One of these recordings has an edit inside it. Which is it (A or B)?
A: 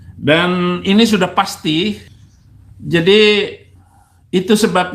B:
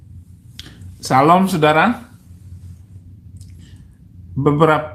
A